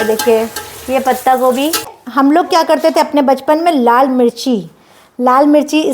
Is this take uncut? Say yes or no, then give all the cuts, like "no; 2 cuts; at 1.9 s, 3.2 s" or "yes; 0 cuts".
no; 1 cut; at 2.0 s